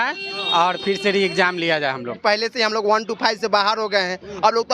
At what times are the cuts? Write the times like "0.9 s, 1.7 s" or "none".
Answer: 2.1 s